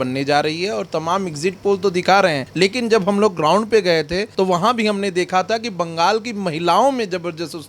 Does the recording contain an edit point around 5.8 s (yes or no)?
no